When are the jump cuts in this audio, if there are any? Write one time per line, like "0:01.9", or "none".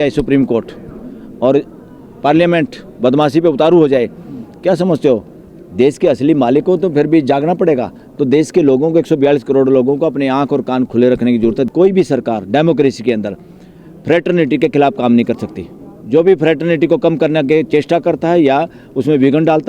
0:11.7